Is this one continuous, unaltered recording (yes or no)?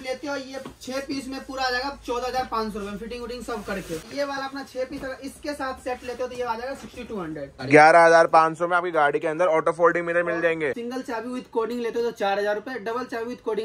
no